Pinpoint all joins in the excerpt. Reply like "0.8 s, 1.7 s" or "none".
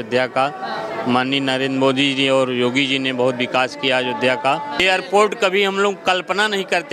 4.7 s